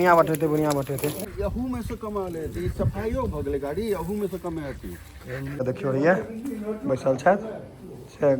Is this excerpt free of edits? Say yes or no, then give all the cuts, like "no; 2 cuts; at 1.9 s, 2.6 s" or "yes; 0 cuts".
no; 2 cuts; at 1.3 s, 5.0 s